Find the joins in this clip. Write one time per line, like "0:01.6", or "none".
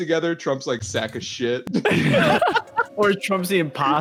none